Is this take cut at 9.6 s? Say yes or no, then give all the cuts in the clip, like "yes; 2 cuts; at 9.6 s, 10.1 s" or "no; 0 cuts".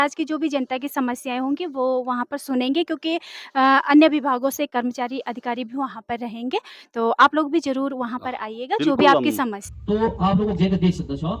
yes; 1 cut; at 9.6 s